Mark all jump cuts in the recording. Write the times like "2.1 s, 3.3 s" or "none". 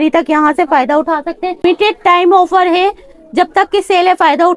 1.6 s